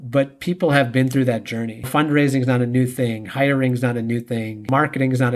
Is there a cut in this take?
yes; 1 cut; at 1.9 s

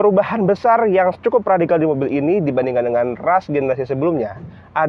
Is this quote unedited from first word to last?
yes; 0 cuts

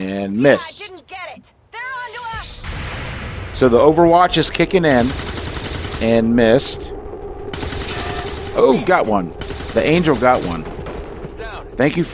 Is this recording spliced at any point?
yes; 1 cut; at 2.6 s

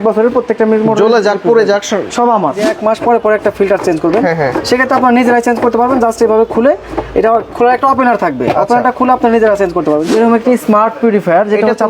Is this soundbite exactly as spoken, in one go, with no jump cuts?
no; 2 cuts; at 2.7 s, 10.1 s

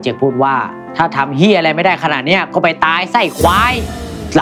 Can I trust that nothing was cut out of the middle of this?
yes; 0 cuts

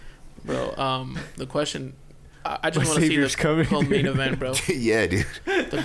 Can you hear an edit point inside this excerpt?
no; 0 cuts

